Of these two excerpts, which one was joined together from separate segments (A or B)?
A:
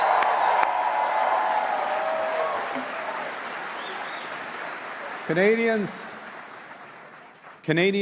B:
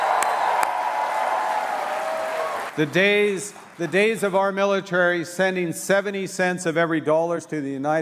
B